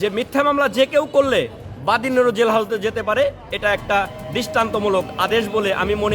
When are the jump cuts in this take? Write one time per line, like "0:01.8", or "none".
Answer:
none